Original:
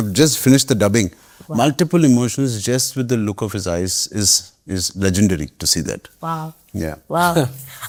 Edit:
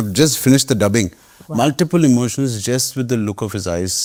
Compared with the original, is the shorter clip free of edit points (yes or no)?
yes